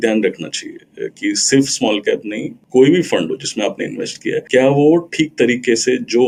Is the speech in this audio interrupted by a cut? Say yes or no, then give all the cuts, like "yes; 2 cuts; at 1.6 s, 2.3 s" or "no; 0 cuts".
no; 0 cuts